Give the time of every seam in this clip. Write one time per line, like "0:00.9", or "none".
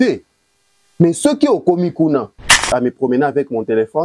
0:02.6